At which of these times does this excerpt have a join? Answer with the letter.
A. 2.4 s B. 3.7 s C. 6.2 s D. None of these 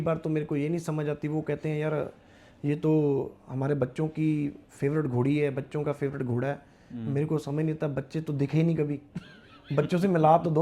D